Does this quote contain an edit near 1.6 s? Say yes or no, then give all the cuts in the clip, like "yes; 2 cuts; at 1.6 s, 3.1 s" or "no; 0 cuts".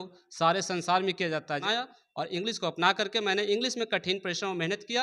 yes; 1 cut; at 1.6 s